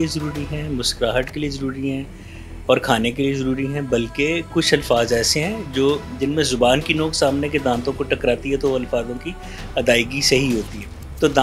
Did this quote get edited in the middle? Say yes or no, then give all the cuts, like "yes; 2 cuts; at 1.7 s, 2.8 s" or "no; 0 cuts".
no; 0 cuts